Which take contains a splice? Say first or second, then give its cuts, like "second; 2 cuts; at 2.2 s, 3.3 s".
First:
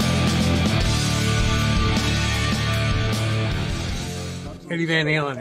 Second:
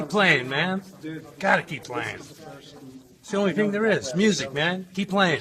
first; 1 cut; at 4.5 s